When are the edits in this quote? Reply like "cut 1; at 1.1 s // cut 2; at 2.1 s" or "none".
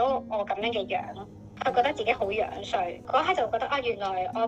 none